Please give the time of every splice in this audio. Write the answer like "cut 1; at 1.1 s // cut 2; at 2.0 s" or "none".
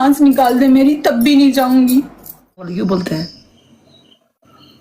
cut 1; at 2.7 s